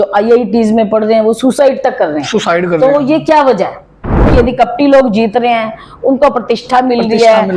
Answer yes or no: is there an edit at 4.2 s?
yes